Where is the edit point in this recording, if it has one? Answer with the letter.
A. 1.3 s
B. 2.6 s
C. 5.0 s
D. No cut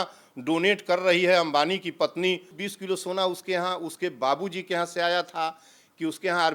B